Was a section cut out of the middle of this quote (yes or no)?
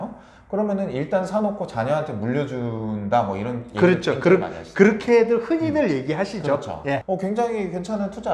yes